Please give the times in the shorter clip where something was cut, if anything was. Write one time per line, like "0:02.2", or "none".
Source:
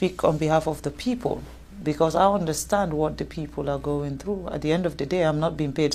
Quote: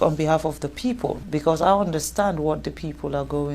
0:01.0